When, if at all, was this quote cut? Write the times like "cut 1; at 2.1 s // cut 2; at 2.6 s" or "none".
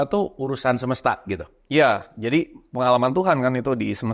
none